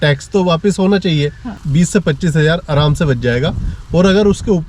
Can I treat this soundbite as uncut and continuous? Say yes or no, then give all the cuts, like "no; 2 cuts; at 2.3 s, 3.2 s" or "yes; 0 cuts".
no; 1 cut; at 1.5 s